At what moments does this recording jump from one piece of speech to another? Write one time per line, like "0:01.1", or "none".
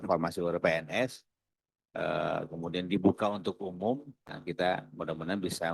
0:04.1